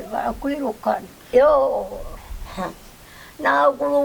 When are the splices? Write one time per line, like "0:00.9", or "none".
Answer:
0:01.1